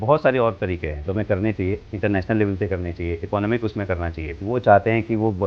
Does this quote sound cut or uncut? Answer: cut